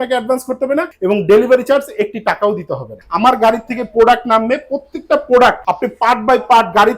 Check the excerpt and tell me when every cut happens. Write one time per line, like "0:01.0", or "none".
0:00.9
0:03.0
0:05.7